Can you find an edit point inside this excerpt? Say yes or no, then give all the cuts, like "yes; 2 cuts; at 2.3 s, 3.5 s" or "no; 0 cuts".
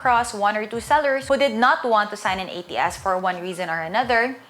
yes; 1 cut; at 1.2 s